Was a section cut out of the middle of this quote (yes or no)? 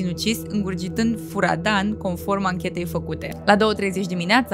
yes